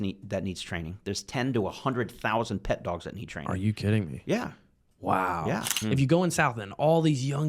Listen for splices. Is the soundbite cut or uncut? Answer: cut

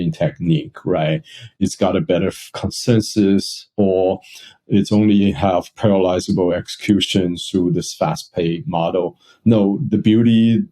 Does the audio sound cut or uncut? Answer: cut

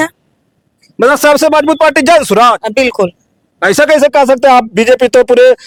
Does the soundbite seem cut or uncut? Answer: uncut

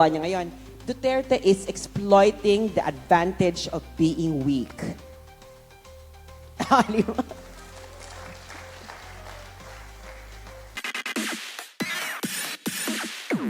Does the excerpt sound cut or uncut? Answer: cut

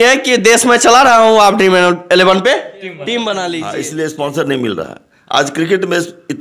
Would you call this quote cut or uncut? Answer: cut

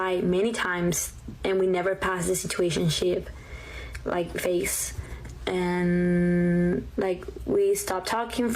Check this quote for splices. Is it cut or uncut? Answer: cut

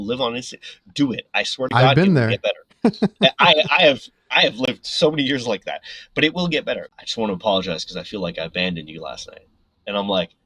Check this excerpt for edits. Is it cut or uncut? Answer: cut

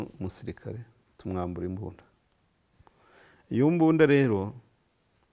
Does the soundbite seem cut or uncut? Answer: uncut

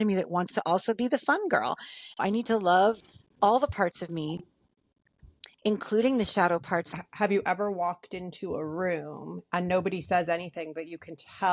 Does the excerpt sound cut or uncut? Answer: cut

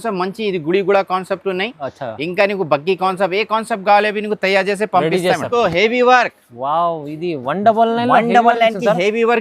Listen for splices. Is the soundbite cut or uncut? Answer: cut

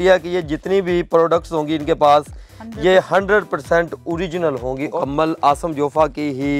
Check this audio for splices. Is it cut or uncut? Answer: cut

